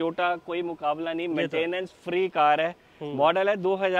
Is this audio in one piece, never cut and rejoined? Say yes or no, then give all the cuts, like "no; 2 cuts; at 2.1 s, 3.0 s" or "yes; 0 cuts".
yes; 0 cuts